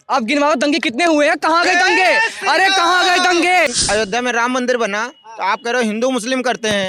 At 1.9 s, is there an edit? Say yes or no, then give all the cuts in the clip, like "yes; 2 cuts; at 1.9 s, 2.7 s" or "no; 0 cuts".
no; 1 cut; at 3.7 s